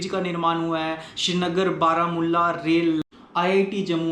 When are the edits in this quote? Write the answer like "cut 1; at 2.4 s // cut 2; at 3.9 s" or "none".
cut 1; at 3.0 s